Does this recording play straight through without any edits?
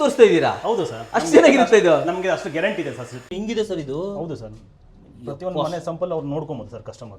no; 1 cut; at 3.3 s

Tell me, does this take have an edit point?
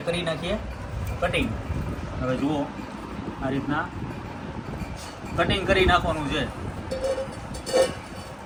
no; 0 cuts

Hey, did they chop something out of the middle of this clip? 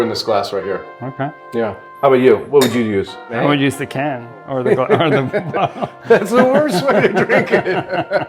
no; 0 cuts

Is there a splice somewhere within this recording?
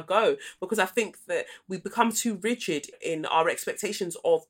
yes; 1 cut; at 2.9 s

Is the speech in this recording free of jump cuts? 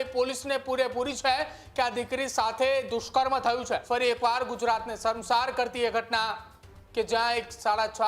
no; 1 cut; at 3.8 s

